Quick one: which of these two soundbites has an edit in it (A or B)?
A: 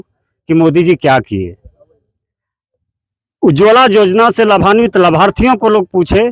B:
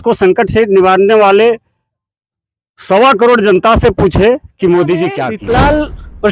B